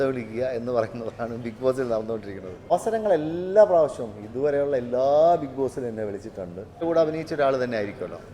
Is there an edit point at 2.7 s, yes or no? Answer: yes